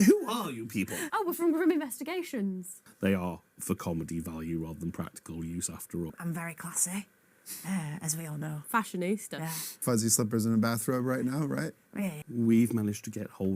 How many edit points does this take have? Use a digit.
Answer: 5